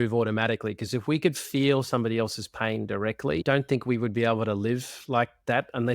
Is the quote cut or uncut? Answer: cut